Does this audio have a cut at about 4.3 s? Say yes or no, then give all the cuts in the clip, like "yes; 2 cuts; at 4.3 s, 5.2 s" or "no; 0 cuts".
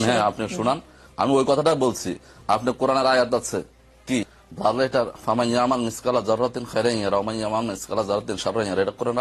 yes; 1 cut; at 4.3 s